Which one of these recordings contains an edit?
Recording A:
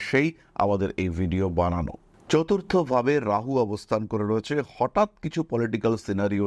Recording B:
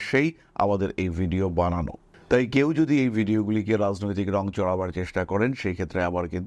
A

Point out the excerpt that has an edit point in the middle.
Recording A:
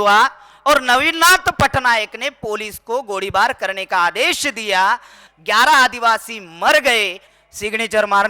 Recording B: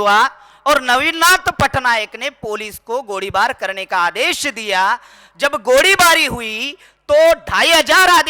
A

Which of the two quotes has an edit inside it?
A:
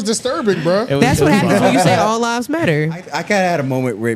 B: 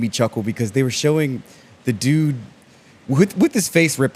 A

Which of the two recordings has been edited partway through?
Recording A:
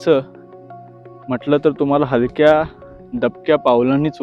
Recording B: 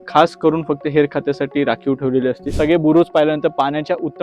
B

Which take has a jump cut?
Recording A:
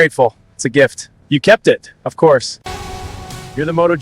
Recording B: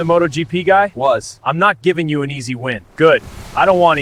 A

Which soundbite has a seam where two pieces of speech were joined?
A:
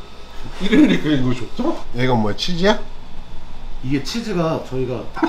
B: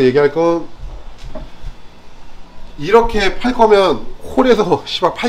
A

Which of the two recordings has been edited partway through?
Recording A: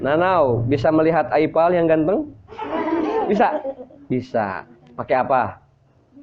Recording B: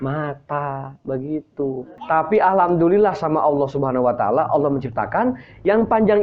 B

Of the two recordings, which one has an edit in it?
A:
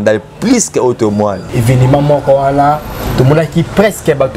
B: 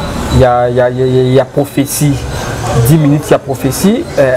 A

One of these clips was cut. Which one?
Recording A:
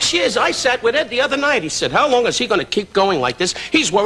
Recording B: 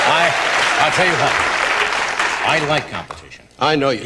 A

